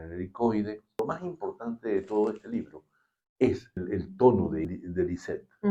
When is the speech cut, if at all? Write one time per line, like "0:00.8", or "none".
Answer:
0:01.0
0:03.8
0:04.6